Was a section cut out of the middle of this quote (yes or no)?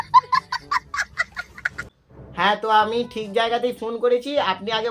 yes